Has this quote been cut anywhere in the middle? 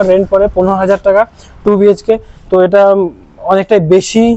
no; 0 cuts

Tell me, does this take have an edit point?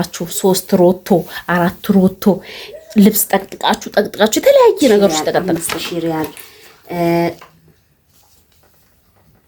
yes; 1 cut; at 5.5 s

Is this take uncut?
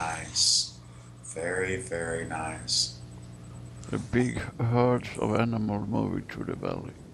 no; 1 cut; at 5.8 s

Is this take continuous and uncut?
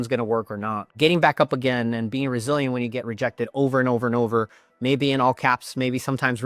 no; 1 cut; at 0.9 s

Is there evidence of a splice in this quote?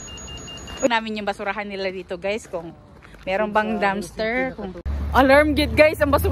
yes; 2 cuts; at 0.9 s, 4.9 s

